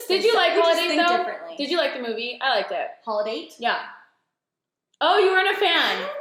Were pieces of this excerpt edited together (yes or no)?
no